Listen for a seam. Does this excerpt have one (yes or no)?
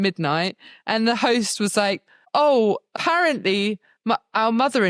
yes